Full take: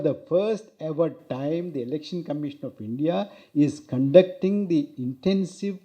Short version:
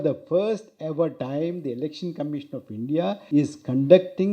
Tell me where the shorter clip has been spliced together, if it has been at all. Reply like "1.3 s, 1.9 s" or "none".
1.2 s, 3.2 s